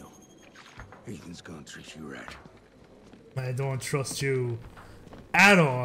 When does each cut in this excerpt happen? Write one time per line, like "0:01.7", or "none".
none